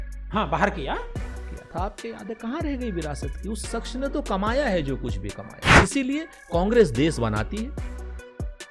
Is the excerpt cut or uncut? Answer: cut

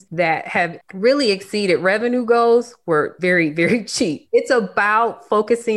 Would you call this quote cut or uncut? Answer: cut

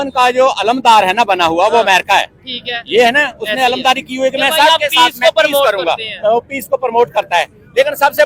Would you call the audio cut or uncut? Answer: uncut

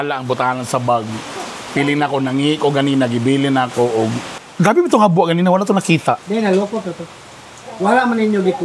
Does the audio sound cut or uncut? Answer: cut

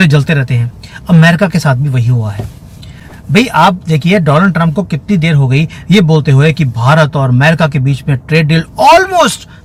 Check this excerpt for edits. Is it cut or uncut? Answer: uncut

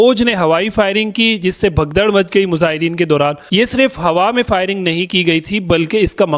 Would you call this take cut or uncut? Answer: cut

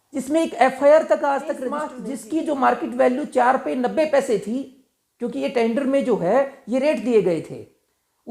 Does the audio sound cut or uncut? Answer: cut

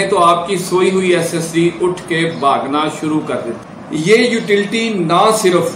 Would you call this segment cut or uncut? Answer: cut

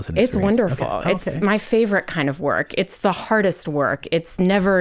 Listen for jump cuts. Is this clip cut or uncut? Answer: uncut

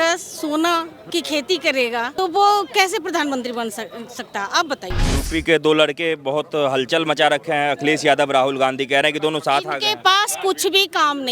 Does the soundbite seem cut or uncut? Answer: cut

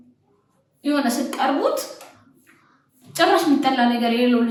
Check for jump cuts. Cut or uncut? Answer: uncut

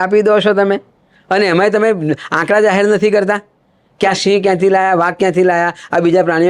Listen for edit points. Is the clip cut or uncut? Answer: uncut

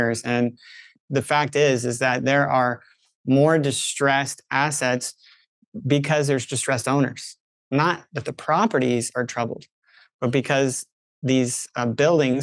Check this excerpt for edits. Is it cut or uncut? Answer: cut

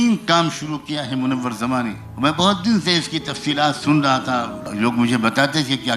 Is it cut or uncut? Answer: cut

